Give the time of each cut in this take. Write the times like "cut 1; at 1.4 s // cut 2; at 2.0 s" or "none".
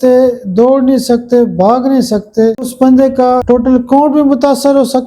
cut 1; at 2.7 s // cut 2; at 3.4 s